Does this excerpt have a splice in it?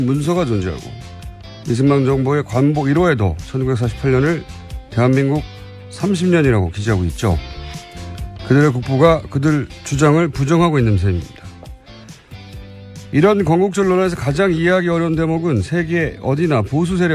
yes; 1 cut; at 6.2 s

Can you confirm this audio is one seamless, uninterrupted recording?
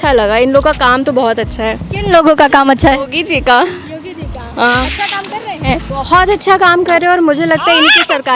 yes; 0 cuts

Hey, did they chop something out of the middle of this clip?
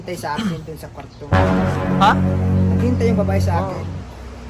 no; 0 cuts

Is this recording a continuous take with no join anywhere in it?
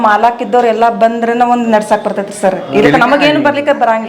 yes; 0 cuts

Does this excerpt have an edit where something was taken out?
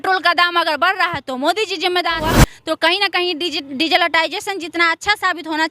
yes; 1 cut; at 2.2 s

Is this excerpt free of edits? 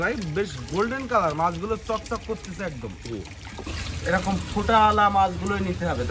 no; 1 cut; at 3.7 s

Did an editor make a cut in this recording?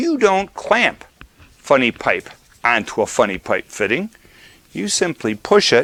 no; 0 cuts

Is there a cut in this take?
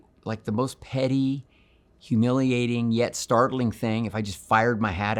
no; 0 cuts

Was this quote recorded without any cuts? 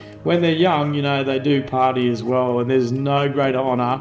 yes; 0 cuts

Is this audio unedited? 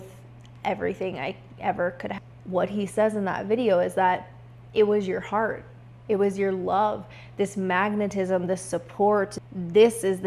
no; 2 cuts; at 2.1 s, 9.4 s

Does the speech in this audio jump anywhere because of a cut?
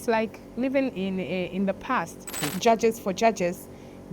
yes; 1 cut; at 2.5 s

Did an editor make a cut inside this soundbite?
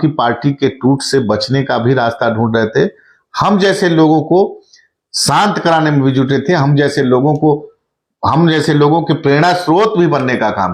no; 0 cuts

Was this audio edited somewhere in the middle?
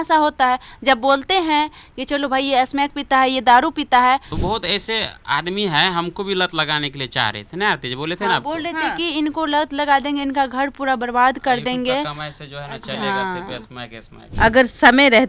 yes; 2 cuts; at 4.3 s, 14.2 s

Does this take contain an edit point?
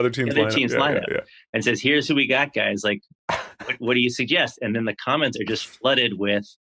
no; 0 cuts

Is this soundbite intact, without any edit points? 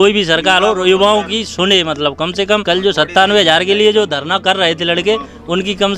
no; 1 cut; at 2.6 s

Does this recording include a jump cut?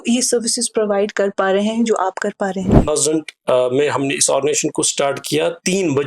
yes; 1 cut; at 2.9 s

